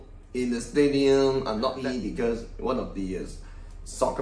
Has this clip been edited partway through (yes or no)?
yes